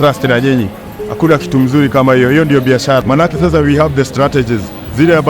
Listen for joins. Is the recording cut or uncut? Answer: cut